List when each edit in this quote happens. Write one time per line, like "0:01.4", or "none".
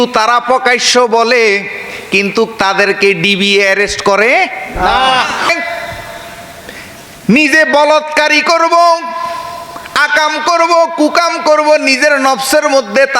0:05.5